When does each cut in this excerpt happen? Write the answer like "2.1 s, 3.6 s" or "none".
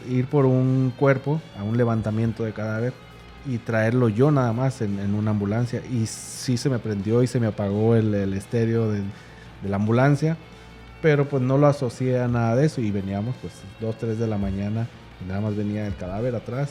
none